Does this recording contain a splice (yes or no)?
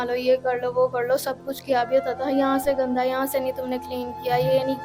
no